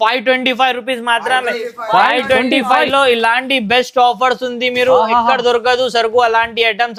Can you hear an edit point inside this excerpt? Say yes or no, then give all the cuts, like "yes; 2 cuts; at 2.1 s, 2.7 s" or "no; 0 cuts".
no; 0 cuts